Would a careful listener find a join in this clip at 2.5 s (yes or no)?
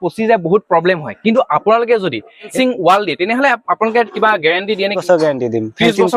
yes